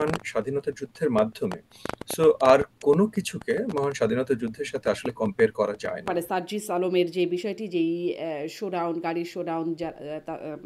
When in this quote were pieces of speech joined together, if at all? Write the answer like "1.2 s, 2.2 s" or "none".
6.1 s

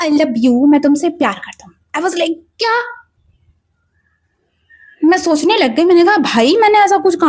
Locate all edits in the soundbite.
none

